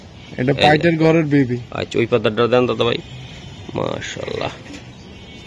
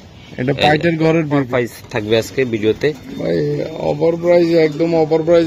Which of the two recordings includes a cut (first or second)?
second